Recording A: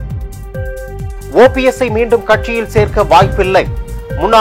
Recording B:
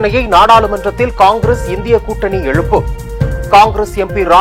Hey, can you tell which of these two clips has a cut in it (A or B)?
A